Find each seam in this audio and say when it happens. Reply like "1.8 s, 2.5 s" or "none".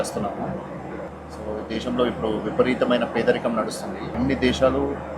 1.1 s, 4.1 s